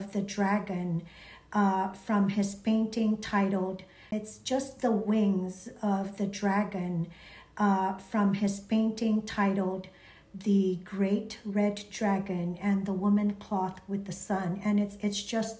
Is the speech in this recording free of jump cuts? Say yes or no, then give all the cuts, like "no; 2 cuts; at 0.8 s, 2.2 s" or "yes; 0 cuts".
no; 1 cut; at 4.1 s